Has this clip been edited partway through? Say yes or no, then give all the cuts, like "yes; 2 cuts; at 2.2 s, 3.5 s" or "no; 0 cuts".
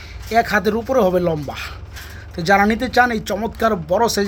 no; 0 cuts